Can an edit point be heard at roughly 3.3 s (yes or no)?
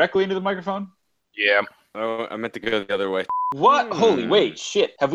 yes